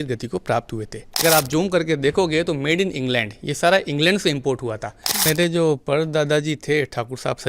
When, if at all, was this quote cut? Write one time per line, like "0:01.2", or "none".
0:01.2
0:05.3